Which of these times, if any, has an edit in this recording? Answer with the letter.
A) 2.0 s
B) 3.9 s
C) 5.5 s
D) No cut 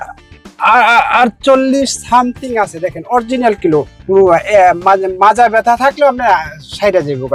B